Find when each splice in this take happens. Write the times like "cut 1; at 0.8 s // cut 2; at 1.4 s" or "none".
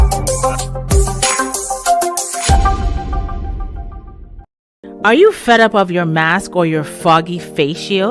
cut 1; at 4.8 s